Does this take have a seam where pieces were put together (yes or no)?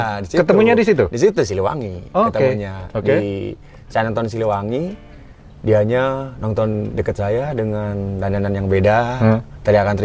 no